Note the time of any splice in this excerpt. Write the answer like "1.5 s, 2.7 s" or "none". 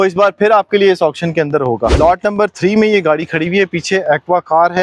1.9 s